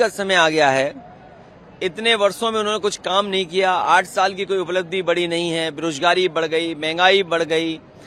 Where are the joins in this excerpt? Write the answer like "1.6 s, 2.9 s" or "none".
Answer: none